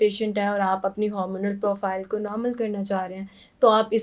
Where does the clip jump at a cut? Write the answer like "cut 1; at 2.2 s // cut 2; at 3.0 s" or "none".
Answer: none